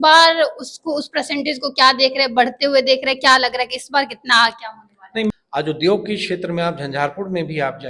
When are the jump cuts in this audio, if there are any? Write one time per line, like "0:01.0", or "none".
0:05.3